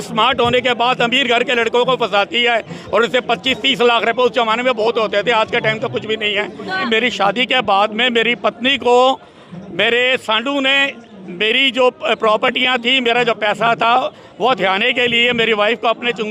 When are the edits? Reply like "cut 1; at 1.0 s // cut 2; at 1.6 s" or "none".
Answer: cut 1; at 6.8 s